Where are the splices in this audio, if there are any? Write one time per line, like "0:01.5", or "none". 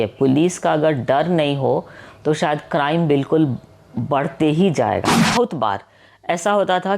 0:05.2